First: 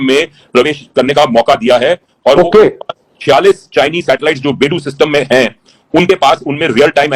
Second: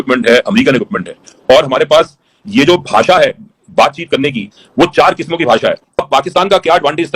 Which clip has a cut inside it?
second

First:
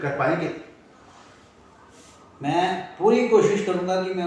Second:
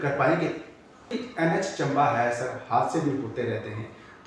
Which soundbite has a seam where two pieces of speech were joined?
second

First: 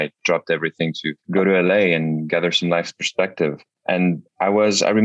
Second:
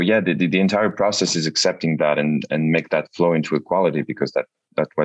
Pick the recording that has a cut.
first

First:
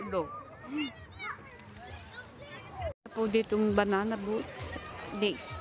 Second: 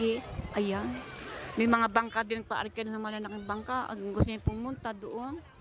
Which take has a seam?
first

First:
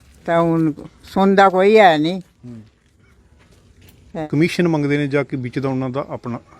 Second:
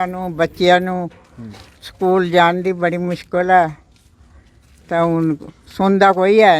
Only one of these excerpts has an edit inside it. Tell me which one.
first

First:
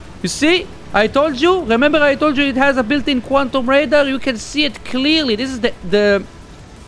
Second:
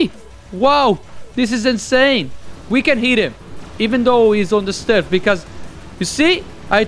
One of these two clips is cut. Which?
second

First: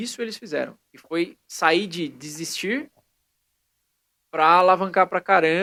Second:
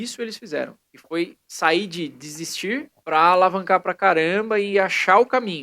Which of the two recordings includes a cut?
second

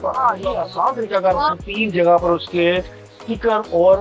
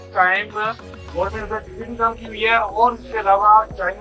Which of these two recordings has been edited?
first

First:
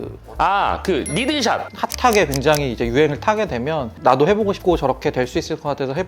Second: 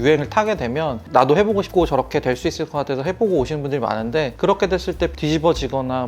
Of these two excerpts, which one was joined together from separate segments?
first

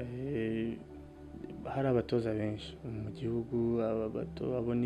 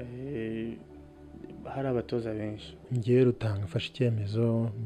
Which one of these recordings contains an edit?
second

